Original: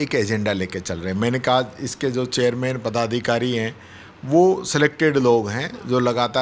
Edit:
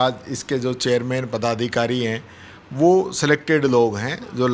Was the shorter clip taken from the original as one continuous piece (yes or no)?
yes